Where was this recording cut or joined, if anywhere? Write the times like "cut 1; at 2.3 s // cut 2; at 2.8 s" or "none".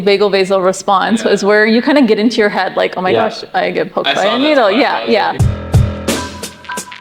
cut 1; at 5.4 s